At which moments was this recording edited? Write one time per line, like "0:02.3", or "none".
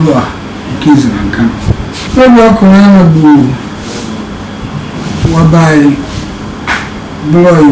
0:02.1